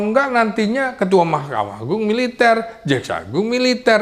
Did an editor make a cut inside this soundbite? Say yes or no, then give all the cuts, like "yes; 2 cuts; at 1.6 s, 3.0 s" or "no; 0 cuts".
no; 0 cuts